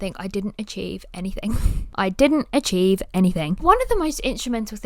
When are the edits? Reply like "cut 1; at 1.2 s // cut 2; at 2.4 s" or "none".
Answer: cut 1; at 1.8 s // cut 2; at 3.6 s